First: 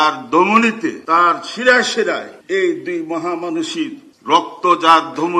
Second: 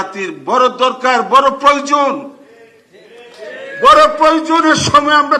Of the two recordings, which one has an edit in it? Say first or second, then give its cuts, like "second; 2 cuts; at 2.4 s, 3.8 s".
first; 3 cuts; at 1.0 s, 2.3 s, 4.1 s